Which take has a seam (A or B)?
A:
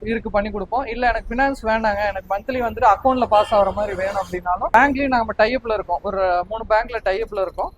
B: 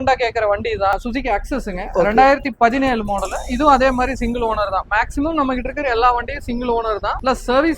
B